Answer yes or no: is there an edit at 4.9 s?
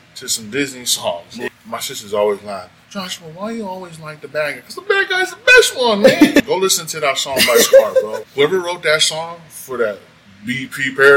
no